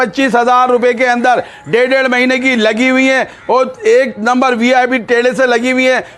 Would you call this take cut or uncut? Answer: uncut